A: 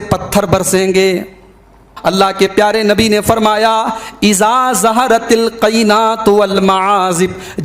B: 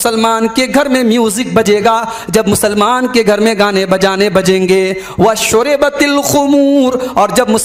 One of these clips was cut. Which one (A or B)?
A